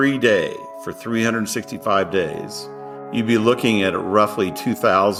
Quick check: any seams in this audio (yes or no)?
no